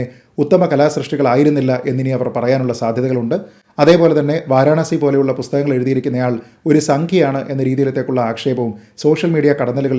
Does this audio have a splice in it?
no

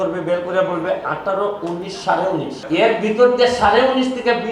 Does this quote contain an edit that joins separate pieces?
yes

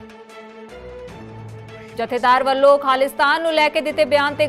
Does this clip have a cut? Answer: yes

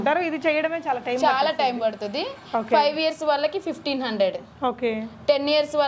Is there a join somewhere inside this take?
no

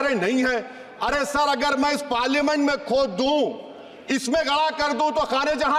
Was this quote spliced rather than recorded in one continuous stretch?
no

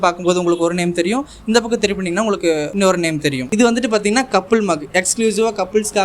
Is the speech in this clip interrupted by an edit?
yes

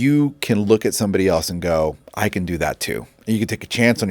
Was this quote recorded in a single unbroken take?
no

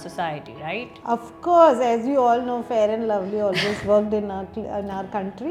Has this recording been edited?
no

